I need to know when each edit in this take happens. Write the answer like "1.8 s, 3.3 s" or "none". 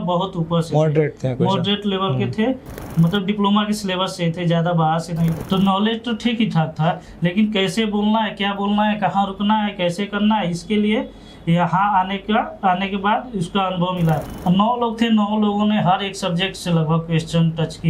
5.4 s, 14.2 s